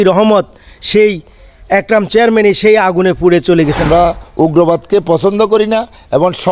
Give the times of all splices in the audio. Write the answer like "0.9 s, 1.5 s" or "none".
3.9 s